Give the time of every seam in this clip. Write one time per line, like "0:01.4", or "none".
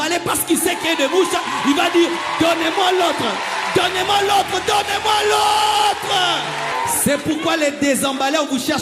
0:06.7